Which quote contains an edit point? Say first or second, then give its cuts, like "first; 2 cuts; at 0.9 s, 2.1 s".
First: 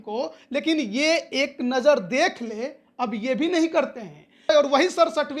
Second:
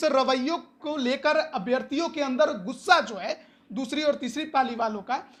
first; 1 cut; at 4.5 s